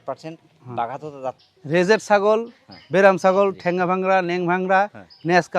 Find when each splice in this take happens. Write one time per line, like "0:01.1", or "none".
0:01.5